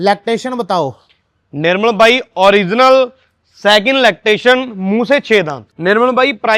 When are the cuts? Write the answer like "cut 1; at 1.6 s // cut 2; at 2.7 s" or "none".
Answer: cut 1; at 5.6 s